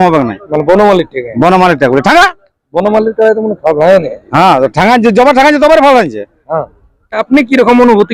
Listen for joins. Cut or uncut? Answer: cut